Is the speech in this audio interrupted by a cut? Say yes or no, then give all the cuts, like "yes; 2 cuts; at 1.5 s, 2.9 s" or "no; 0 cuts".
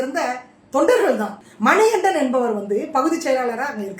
yes; 1 cut; at 1.4 s